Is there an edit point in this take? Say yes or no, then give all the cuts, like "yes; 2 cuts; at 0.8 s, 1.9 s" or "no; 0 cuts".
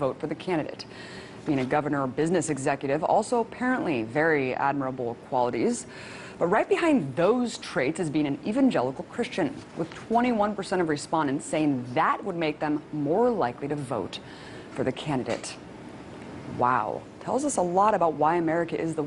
no; 0 cuts